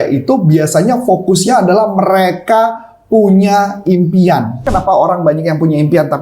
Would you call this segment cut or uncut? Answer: cut